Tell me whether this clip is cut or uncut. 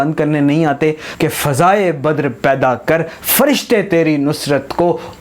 cut